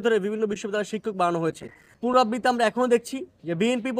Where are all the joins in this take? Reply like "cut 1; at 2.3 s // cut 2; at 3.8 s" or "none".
cut 1; at 1.9 s